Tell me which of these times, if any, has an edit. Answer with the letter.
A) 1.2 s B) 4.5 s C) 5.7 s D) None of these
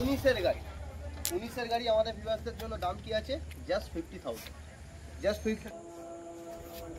C